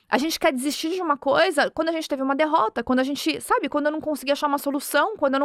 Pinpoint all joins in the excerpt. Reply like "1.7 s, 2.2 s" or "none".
none